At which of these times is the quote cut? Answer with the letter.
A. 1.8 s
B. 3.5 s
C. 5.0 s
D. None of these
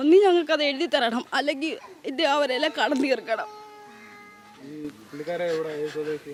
D